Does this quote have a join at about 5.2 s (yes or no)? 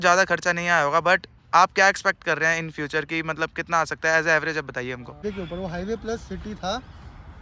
yes